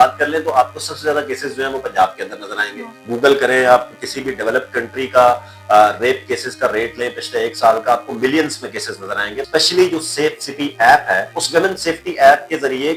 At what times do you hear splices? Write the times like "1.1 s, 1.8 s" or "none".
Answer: 3.0 s, 9.4 s, 11.3 s